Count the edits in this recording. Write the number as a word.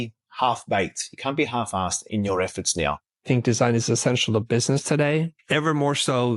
three